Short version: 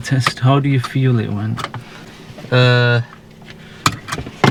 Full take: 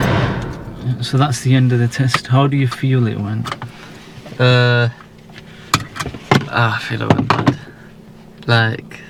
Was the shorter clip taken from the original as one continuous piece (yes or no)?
yes